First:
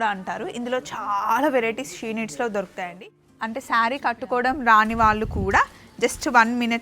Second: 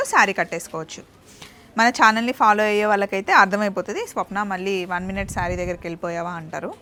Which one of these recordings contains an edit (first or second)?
first